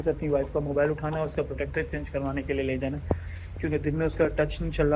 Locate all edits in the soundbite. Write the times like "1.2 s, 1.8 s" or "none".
none